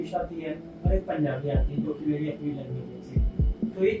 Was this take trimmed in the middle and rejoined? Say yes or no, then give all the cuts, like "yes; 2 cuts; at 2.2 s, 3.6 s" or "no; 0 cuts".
no; 0 cuts